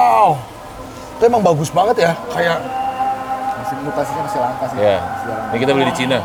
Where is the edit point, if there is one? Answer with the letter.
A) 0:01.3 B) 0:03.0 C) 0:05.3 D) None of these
D